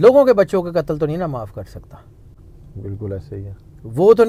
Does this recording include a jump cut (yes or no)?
no